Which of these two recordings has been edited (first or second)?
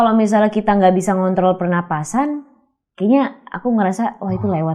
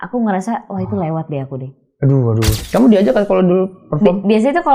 second